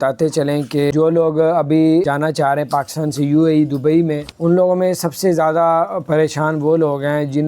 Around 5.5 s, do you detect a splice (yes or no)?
no